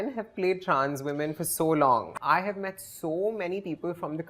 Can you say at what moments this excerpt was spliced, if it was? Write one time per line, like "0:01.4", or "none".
0:02.2